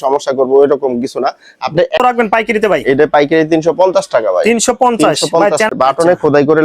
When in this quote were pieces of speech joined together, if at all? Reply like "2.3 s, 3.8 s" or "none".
2.0 s, 5.7 s

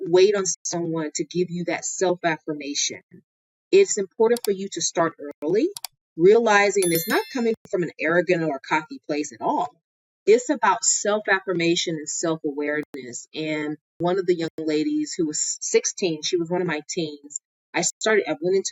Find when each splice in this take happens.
14.0 s

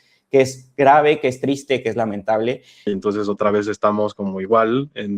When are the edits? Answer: 2.9 s

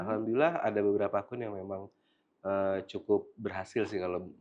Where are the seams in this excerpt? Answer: none

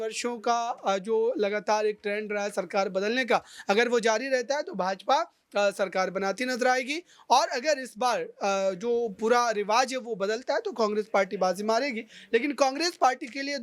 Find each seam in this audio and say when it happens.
none

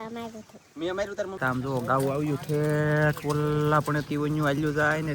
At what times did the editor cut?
1.3 s

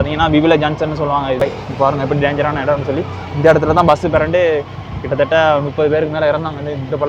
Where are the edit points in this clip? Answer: 1.4 s

